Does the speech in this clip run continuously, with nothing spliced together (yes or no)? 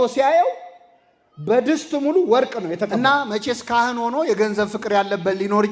no